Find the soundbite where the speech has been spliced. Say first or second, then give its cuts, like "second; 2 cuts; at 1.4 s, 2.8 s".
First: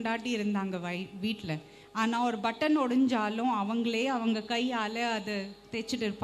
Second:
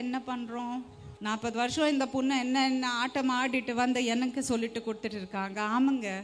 second; 1 cut; at 1.1 s